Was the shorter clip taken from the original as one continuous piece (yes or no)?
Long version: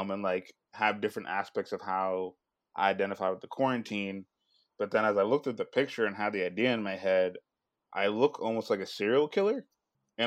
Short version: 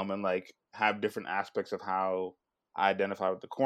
yes